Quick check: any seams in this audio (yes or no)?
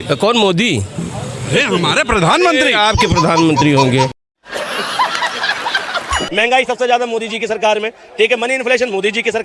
yes